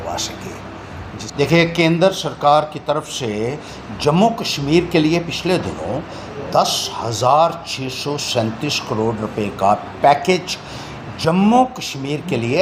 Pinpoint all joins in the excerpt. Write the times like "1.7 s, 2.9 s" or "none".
none